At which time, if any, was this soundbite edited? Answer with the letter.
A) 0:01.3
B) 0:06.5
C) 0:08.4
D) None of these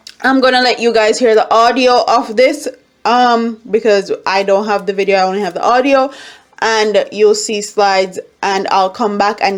D